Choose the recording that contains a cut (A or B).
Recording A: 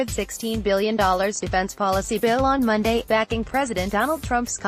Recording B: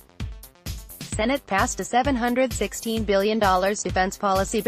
B